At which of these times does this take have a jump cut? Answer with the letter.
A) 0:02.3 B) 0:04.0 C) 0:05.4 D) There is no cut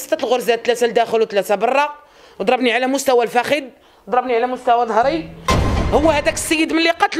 C